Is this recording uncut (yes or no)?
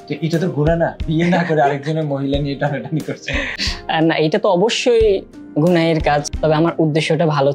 no